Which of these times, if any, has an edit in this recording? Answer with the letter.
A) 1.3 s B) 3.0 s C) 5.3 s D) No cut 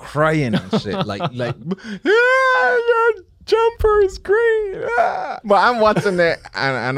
C